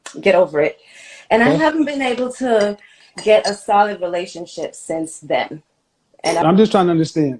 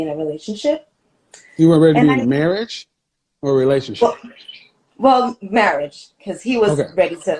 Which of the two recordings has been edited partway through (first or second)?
first